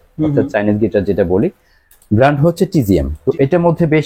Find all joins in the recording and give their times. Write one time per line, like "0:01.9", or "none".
0:03.1